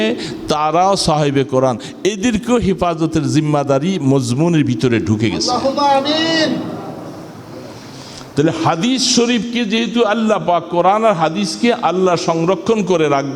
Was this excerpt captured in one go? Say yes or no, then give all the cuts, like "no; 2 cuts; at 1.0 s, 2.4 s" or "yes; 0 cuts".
yes; 0 cuts